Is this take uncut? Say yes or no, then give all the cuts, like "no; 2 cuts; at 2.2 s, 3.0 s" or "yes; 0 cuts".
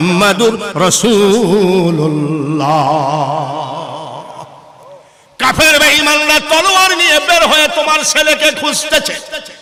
yes; 0 cuts